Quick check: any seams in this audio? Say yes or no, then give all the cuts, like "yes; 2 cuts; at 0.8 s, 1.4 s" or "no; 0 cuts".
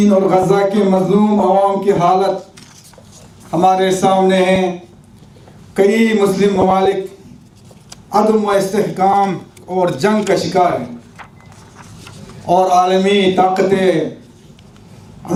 no; 0 cuts